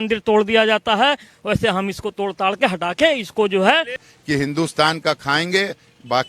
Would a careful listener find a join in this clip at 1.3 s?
no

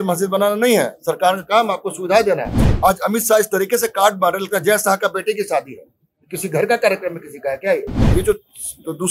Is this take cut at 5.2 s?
no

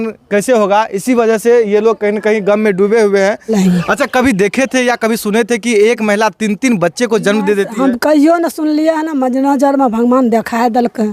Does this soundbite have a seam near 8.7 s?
no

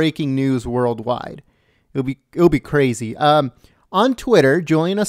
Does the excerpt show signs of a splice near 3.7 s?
no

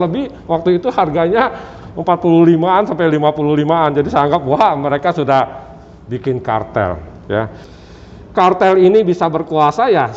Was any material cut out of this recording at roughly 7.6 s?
yes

